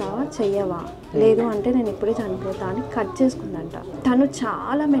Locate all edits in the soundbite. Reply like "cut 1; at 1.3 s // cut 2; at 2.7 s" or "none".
cut 1; at 3.9 s